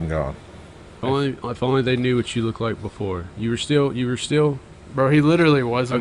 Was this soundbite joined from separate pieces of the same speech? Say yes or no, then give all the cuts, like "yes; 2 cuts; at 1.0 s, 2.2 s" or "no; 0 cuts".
yes; 1 cut; at 1.0 s